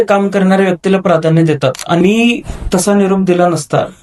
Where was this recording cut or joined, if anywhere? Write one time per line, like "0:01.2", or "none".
0:02.0